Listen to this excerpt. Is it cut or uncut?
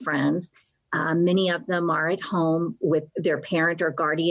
cut